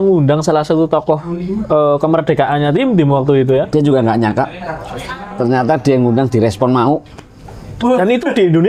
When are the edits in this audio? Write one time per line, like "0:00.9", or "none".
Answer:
none